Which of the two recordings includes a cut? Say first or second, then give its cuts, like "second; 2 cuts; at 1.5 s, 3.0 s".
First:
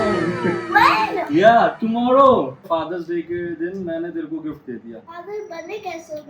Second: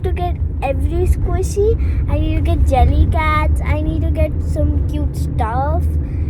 first; 2 cuts; at 2.6 s, 5.1 s